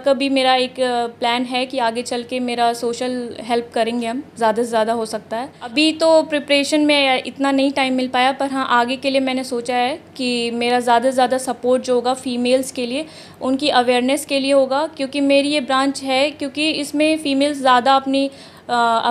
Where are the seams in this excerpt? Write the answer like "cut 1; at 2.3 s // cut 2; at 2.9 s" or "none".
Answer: cut 1; at 5.7 s